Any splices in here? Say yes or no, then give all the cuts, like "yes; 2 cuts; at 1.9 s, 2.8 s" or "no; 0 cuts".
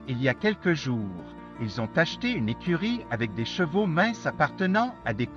no; 0 cuts